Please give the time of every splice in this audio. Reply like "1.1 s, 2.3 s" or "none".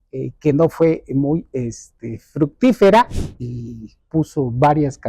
3.1 s

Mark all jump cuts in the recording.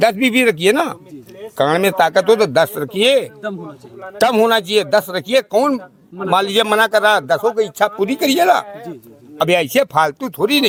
none

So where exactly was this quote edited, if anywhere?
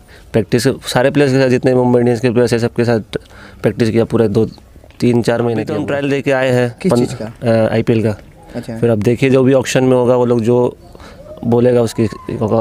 5.8 s

